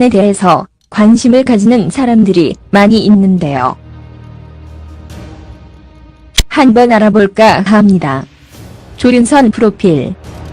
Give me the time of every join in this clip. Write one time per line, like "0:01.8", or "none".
0:07.2